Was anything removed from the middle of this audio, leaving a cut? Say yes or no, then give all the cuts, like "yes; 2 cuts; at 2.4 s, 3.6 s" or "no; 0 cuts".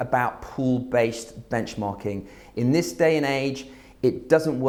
no; 0 cuts